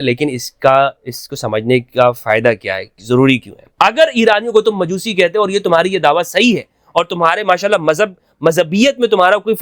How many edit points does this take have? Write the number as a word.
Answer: one